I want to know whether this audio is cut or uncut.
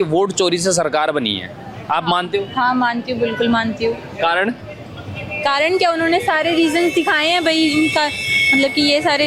uncut